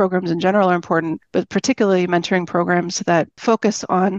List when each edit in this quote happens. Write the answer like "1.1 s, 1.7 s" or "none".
none